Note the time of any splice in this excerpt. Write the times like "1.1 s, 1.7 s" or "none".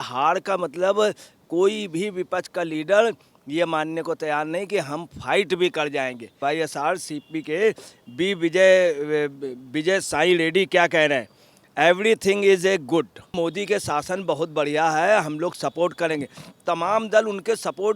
6.3 s, 13.3 s